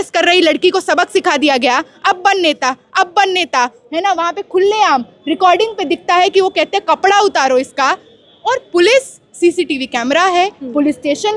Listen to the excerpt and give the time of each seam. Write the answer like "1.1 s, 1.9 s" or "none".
none